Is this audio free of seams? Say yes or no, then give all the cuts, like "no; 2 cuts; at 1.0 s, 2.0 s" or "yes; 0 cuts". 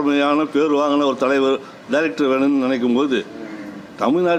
yes; 0 cuts